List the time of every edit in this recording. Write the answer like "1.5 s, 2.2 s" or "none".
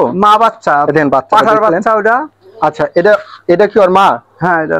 none